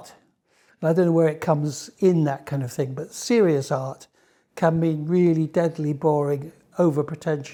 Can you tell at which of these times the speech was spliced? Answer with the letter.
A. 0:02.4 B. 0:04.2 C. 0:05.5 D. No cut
D